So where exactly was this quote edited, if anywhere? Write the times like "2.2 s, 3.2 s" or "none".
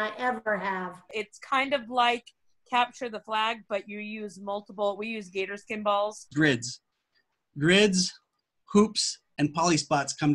1.0 s, 6.3 s